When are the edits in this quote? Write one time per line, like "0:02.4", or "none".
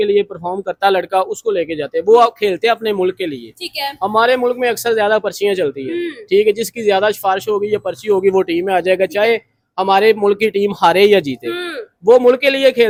none